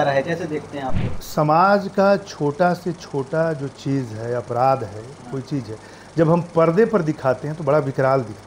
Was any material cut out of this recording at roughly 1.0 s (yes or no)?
yes